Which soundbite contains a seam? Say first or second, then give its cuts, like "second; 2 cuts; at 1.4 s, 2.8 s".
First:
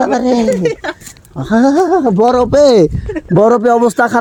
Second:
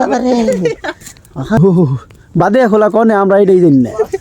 second; 1 cut; at 1.6 s